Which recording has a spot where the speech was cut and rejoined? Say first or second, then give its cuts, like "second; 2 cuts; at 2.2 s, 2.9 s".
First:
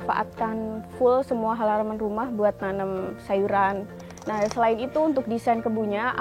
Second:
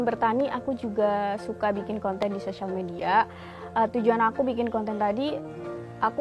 first; 1 cut; at 3.9 s